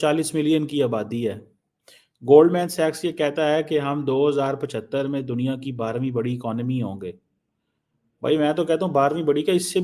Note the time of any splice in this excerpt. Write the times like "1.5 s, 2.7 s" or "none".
none